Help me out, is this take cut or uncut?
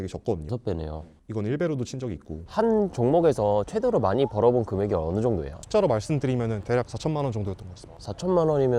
cut